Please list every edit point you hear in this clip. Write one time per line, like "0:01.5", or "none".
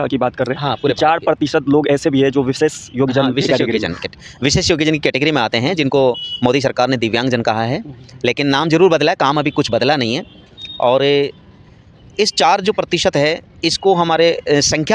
none